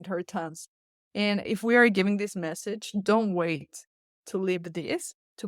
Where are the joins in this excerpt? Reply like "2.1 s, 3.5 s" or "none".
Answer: 1.4 s